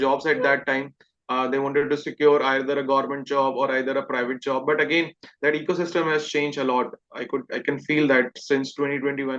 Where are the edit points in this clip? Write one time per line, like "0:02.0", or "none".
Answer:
none